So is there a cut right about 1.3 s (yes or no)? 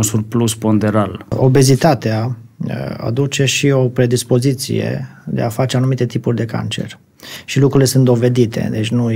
yes